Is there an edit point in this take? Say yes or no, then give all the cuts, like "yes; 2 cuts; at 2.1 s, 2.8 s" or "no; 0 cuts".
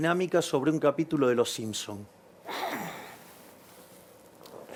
no; 0 cuts